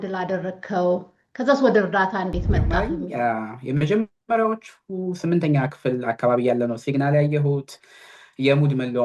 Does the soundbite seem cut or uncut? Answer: cut